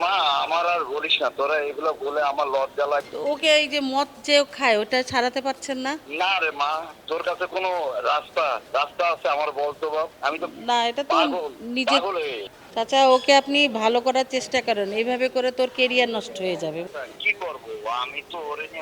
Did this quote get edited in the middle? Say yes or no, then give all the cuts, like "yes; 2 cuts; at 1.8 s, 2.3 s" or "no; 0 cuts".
yes; 3 cuts; at 3.0 s, 12.5 s, 16.9 s